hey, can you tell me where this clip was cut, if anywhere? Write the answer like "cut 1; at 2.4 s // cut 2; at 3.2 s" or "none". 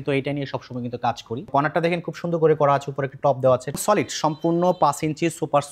cut 1; at 1.5 s // cut 2; at 3.7 s